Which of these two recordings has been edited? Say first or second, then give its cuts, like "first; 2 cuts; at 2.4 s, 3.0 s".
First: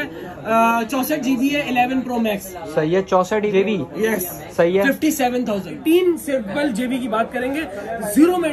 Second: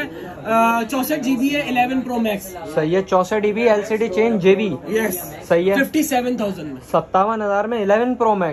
first; 2 cuts; at 3.5 s, 5.8 s